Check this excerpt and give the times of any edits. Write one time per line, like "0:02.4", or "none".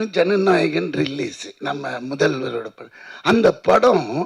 0:01.5